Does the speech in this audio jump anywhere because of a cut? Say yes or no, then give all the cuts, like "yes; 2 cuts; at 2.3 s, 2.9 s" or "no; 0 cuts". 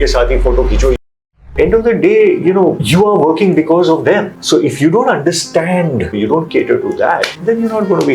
yes; 5 cuts; at 1.2 s, 2.8 s, 4.3 s, 6.1 s, 7.3 s